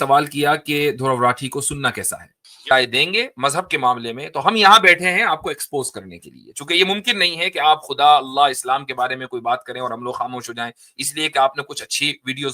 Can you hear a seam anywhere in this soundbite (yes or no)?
yes